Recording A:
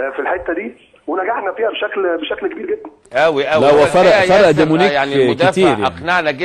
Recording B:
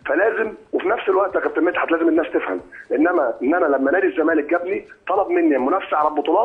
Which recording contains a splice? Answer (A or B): B